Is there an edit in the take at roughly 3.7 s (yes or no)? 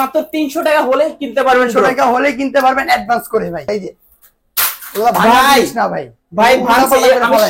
yes